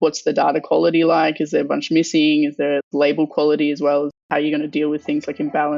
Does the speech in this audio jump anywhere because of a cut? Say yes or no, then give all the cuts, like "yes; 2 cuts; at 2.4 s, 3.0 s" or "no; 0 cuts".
yes; 1 cut; at 4.2 s